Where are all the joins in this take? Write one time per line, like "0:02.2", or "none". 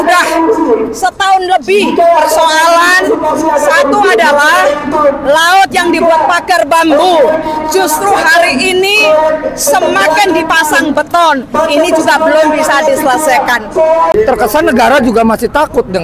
0:14.1